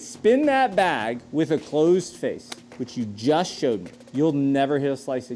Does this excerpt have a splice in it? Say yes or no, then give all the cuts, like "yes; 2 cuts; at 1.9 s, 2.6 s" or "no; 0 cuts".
yes; 1 cut; at 4.0 s